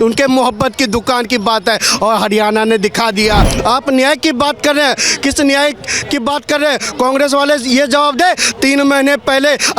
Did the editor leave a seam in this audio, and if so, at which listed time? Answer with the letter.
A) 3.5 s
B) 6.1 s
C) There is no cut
A